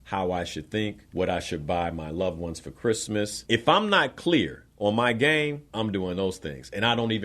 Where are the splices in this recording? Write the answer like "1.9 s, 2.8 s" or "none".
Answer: 1.0 s, 3.4 s, 5.6 s